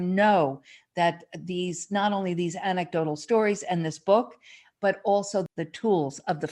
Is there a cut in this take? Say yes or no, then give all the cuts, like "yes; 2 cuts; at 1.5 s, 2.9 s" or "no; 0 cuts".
yes; 1 cut; at 5.5 s